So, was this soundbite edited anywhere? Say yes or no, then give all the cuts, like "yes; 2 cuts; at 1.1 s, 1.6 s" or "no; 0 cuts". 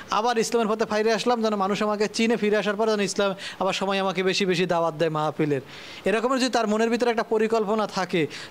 no; 0 cuts